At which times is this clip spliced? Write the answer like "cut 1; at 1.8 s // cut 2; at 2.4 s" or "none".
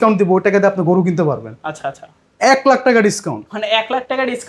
none